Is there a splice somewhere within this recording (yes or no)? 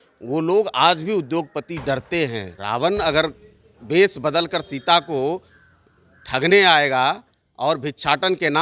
yes